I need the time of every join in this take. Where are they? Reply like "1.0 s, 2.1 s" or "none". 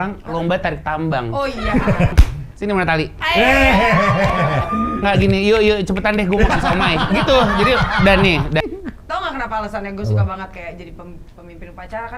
2.1 s, 8.6 s